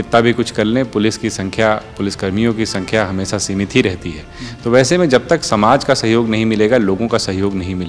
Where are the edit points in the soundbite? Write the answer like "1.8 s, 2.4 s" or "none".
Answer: none